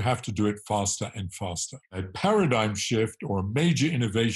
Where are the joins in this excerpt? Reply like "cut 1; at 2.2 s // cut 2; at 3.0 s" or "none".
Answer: cut 1; at 2.1 s